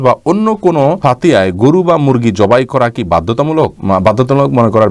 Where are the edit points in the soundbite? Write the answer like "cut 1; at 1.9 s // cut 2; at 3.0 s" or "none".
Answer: cut 1; at 1.0 s // cut 2; at 3.8 s